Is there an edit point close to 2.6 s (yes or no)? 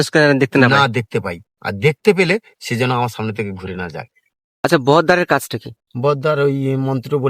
no